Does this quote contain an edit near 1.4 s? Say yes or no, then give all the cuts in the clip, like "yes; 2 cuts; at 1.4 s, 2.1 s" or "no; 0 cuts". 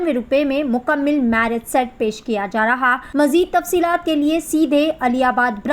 no; 1 cut; at 3.0 s